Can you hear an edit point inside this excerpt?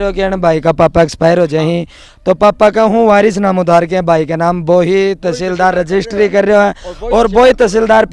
no; 0 cuts

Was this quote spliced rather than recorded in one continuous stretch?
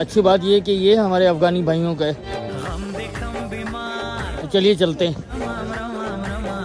no; 0 cuts

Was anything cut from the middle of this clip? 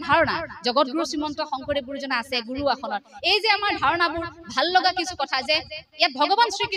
no; 0 cuts

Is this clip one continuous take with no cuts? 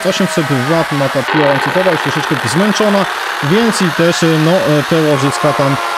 yes; 0 cuts

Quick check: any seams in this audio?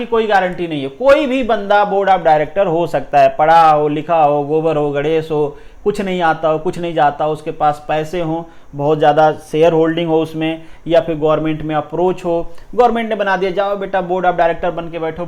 no; 0 cuts

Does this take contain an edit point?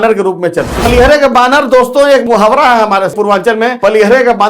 yes; 2 cuts; at 0.9 s, 3.0 s

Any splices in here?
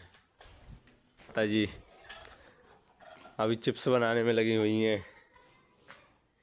yes; 1 cut; at 1.3 s

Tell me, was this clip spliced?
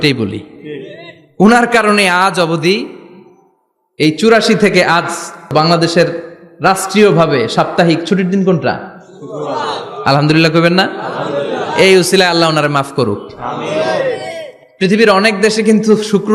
yes; 1 cut; at 5.5 s

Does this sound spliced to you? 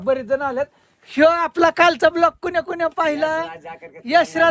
no; 0 cuts

